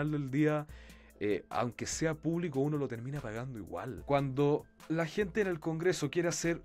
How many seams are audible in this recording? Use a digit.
1